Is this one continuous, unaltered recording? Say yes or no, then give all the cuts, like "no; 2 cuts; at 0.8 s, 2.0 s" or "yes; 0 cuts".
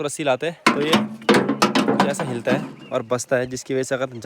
yes; 0 cuts